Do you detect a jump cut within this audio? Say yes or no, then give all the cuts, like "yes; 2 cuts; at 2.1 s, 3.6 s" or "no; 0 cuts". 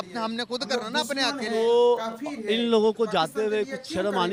no; 0 cuts